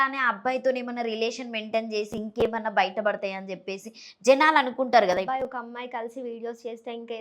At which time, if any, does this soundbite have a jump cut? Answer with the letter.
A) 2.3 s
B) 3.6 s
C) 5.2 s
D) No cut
C